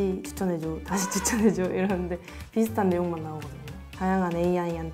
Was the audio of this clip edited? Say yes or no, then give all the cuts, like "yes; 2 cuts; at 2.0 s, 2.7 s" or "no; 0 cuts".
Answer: no; 0 cuts